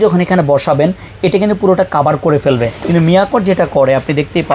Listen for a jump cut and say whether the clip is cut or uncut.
cut